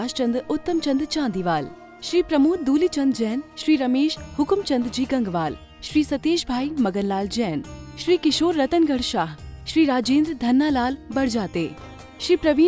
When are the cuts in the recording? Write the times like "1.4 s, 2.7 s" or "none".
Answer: none